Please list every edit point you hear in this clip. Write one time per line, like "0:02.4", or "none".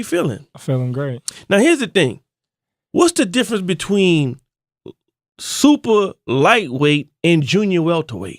0:06.6